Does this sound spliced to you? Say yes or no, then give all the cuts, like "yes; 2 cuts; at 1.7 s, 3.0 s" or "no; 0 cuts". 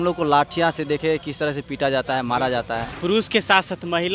yes; 1 cut; at 2.9 s